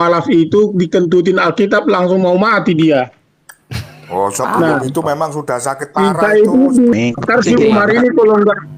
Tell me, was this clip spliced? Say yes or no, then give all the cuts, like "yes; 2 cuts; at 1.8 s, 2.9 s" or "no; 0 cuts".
yes; 1 cut; at 6.9 s